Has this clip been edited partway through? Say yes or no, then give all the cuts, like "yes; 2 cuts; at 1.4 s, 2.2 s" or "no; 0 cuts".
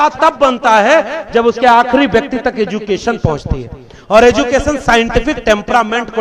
no; 0 cuts